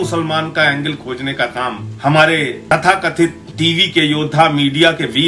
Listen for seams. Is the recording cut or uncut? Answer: cut